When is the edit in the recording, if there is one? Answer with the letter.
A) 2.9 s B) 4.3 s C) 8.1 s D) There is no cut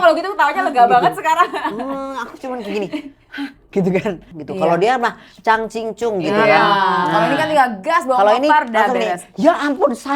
B